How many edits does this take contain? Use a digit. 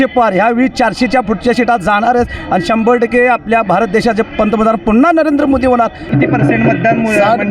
1